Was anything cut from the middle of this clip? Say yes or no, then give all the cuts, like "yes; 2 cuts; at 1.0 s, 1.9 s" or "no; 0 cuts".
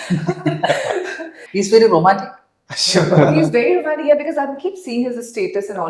yes; 1 cut; at 1.4 s